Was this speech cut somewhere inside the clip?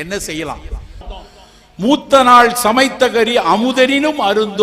yes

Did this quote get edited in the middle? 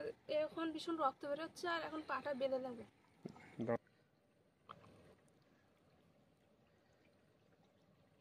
no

